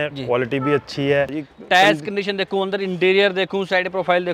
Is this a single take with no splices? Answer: no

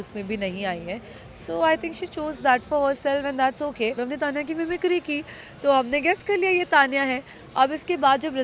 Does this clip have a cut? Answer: yes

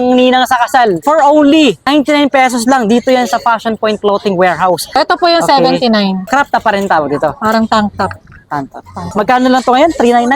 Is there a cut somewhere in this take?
yes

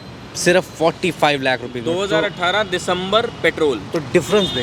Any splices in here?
no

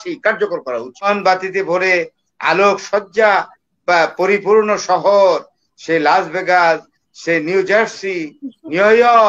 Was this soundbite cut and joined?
yes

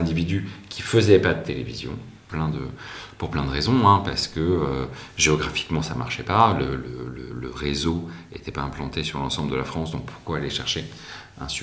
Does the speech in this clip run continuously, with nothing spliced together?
no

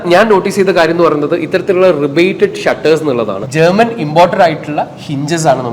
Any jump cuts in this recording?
yes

